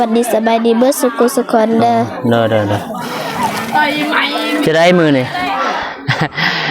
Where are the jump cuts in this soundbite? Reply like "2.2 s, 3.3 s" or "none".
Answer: 5.5 s